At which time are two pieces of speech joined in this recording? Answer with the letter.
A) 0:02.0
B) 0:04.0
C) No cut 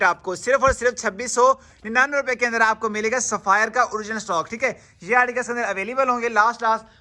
C